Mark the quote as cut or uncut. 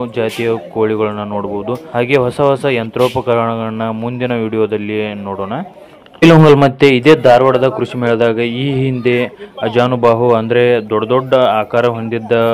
cut